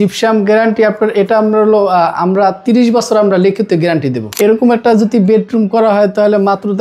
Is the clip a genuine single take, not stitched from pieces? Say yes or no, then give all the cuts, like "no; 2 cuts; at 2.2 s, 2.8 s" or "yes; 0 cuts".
no; 1 cut; at 4.2 s